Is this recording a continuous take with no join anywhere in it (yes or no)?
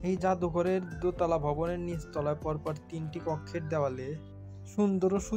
yes